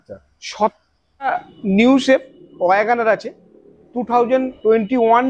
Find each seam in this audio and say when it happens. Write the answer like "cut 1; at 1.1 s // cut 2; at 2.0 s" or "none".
cut 1; at 1.3 s